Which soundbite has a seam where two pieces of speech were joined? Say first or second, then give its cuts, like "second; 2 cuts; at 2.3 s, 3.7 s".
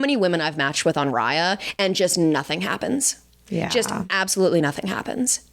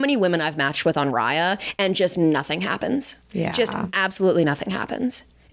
second; 1 cut; at 3.2 s